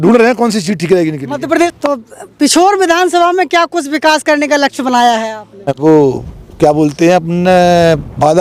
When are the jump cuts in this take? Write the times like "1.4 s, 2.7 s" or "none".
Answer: 1.7 s, 5.7 s